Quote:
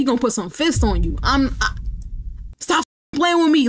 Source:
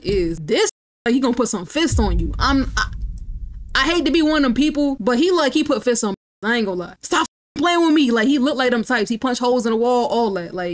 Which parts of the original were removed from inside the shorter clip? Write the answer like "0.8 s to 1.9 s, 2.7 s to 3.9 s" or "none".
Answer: 3.7 s to 6.9 s